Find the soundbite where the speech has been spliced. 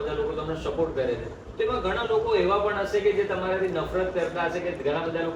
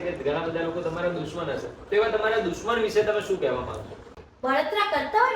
second; 1 cut; at 4.1 s

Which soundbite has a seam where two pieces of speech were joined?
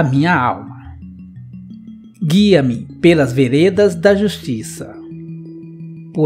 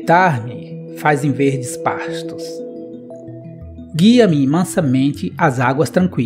second; 2 cuts; at 2.4 s, 3.9 s

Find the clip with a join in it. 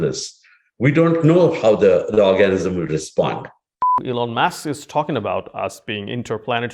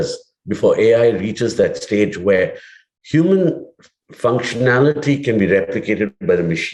first; 1 cut; at 4.0 s

